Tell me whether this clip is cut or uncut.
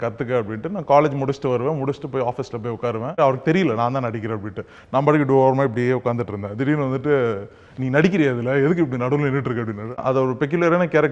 cut